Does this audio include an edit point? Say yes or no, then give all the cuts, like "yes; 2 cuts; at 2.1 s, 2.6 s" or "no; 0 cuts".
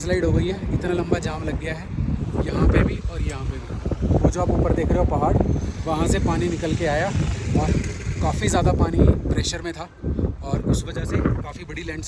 no; 0 cuts